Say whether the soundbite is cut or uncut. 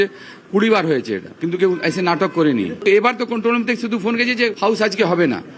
cut